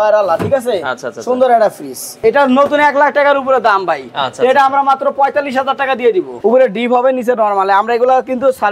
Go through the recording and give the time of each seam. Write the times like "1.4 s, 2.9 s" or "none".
2.1 s, 6.3 s